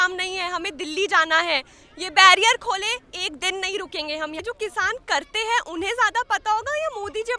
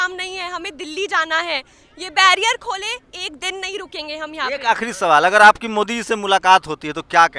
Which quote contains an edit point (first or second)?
first